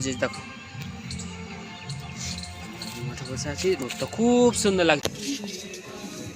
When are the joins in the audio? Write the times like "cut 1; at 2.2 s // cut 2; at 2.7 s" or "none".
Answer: cut 1; at 5.0 s